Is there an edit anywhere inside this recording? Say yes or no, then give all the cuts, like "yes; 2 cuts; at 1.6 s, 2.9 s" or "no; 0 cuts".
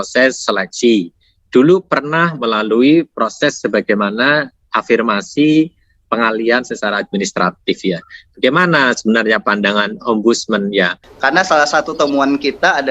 yes; 1 cut; at 11.0 s